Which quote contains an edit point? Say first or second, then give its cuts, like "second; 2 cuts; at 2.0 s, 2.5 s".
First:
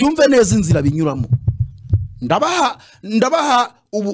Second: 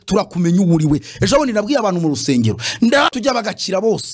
second; 1 cut; at 3.1 s